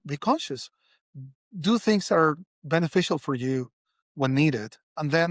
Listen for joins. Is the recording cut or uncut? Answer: uncut